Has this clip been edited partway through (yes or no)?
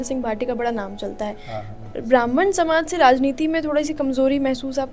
no